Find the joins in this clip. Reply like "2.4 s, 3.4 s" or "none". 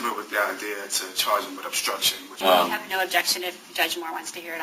2.3 s